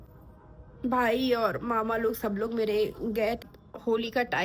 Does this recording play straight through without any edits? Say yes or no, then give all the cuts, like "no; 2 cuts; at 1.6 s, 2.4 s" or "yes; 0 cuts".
no; 1 cut; at 3.4 s